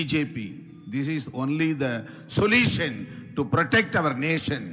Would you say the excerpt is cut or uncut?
uncut